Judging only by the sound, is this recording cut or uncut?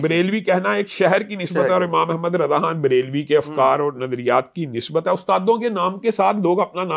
uncut